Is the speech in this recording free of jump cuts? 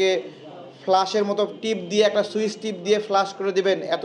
yes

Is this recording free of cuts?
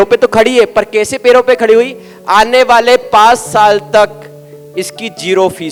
yes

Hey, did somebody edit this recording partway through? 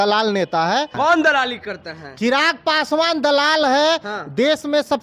yes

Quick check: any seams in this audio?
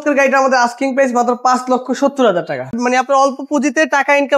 yes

